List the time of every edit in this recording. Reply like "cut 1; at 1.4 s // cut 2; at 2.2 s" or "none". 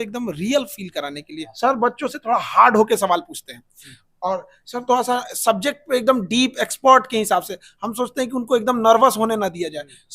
cut 1; at 1.4 s